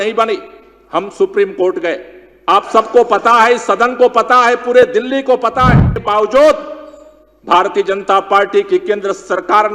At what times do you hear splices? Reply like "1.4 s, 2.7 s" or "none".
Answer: 6.0 s